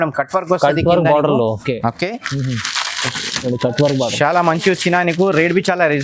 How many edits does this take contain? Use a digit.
0